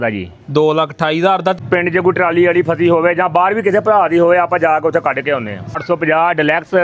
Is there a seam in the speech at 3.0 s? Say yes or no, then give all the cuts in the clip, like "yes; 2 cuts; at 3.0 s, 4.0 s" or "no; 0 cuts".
no; 2 cuts; at 1.5 s, 5.8 s